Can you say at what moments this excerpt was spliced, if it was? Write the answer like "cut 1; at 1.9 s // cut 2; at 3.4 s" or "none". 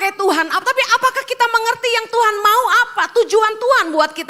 none